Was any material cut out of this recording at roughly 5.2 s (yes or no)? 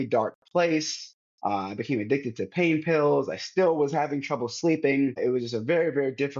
yes